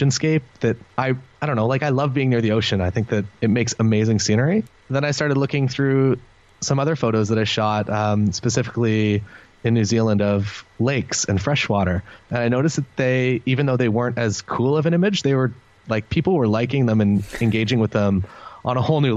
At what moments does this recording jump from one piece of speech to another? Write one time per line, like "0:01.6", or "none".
0:03.3
0:04.8

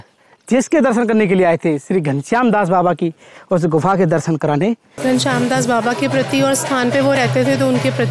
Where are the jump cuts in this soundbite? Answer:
0:04.9

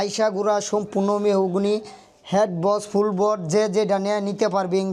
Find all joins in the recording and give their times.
none

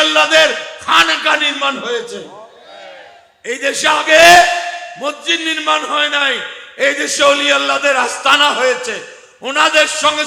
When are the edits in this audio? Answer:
none

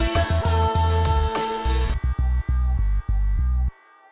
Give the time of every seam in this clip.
0:01.6

